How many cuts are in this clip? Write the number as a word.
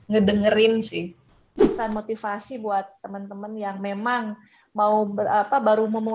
one